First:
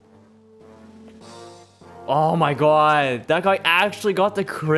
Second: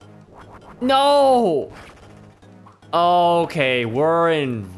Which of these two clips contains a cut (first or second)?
first